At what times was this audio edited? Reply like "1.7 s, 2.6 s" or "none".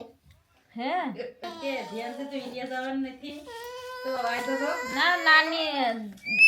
1.5 s

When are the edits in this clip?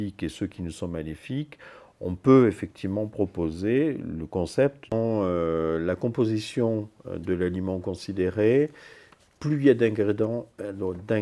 4.9 s

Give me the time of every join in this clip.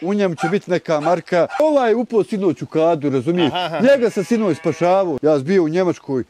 1.6 s, 5.1 s

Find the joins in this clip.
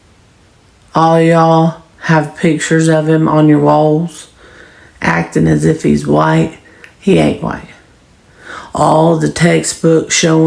none

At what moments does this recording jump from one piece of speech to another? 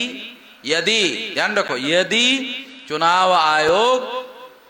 none

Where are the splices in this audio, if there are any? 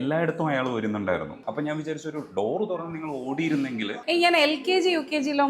1.4 s

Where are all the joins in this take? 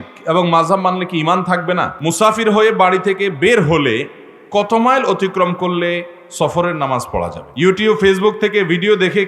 1.9 s, 7.4 s

